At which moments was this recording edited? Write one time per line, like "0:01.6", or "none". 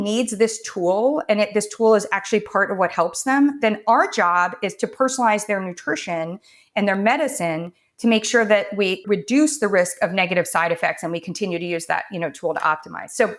0:09.0